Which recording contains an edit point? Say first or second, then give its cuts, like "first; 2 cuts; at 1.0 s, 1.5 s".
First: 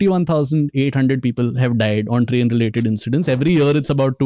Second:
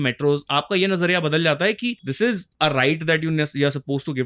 second; 1 cut; at 2.2 s